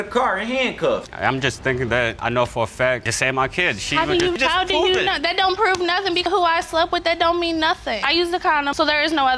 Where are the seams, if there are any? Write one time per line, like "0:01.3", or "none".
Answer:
0:01.1